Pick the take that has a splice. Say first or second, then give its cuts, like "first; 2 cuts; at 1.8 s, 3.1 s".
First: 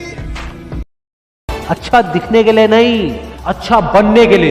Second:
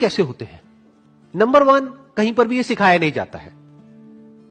first; 1 cut; at 1.0 s